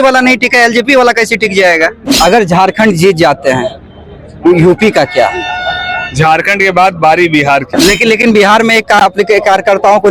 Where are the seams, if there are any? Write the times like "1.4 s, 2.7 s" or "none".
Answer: 2.0 s, 7.7 s